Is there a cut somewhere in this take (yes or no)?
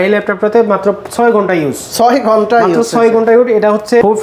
no